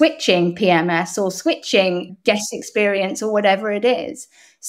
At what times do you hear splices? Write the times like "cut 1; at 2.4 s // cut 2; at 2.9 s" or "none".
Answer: cut 1; at 2.1 s